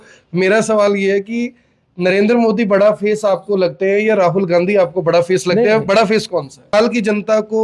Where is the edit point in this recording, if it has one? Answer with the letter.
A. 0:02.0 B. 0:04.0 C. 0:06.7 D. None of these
C